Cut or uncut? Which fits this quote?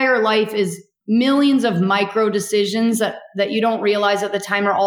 cut